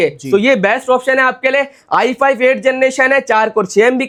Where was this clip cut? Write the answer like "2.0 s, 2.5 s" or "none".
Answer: none